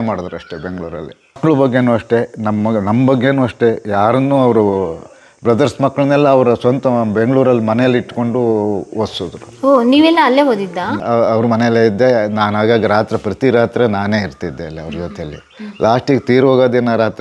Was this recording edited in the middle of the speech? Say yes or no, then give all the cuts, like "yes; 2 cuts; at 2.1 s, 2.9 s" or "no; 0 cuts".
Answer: yes; 2 cuts; at 1.4 s, 10.9 s